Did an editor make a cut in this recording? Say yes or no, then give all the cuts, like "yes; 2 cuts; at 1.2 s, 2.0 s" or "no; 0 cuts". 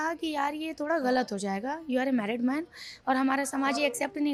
no; 0 cuts